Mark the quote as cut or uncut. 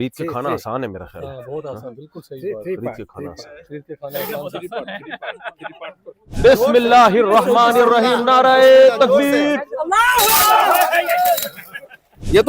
cut